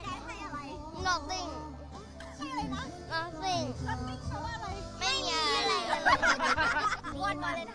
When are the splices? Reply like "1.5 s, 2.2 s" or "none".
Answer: none